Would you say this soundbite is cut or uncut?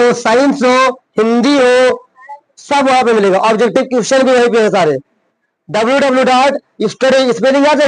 uncut